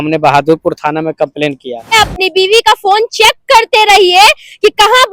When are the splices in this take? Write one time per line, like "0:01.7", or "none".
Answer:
0:01.9

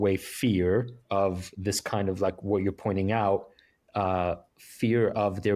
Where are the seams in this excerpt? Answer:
none

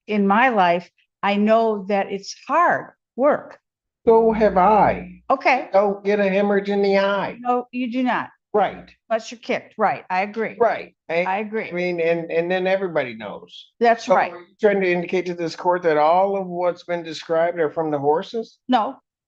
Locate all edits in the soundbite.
none

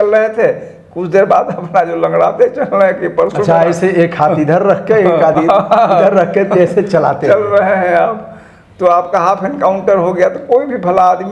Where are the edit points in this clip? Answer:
none

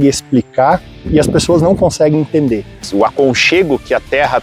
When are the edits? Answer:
0:02.8

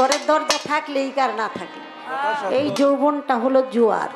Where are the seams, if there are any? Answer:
0:02.4

